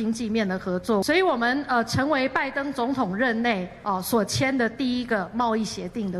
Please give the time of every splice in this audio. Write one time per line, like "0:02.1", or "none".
0:01.0